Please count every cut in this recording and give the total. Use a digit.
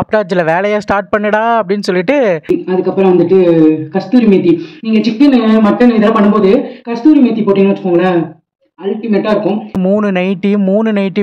2